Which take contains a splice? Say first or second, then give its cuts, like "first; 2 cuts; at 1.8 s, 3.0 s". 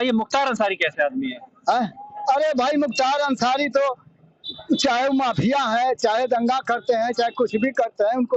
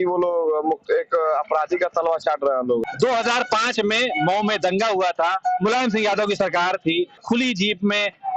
second; 2 cuts; at 2.8 s, 7.2 s